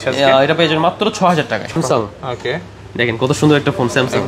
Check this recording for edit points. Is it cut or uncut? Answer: cut